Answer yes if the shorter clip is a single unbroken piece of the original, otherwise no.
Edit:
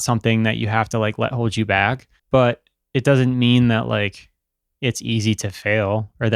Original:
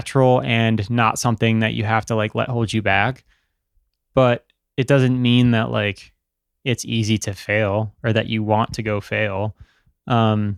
no